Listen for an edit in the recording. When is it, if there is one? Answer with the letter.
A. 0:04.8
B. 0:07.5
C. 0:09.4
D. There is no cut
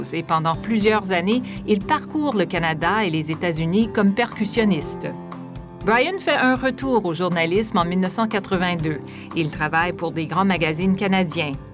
A